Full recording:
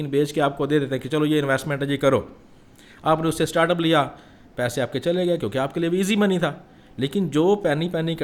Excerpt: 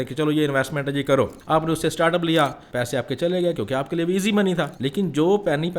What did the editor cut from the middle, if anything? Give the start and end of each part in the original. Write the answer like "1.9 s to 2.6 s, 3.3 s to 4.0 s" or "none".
2.3 s to 2.9 s, 4.2 s to 4.5 s, 6.6 s to 7.0 s